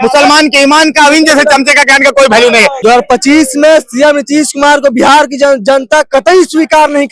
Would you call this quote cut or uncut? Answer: cut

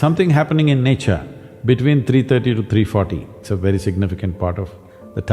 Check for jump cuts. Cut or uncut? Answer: cut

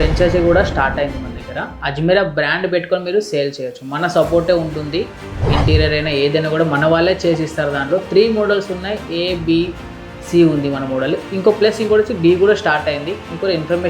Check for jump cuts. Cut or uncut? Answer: uncut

